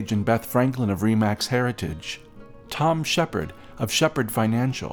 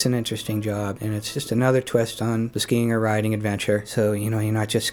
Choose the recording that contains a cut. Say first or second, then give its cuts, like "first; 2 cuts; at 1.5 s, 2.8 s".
second; 3 cuts; at 1.2 s, 2.6 s, 3.9 s